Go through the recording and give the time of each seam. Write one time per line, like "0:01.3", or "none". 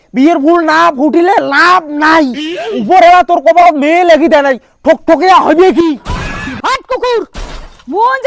0:06.5